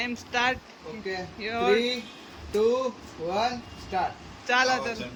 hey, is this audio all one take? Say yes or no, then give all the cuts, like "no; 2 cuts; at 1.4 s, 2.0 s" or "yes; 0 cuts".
yes; 0 cuts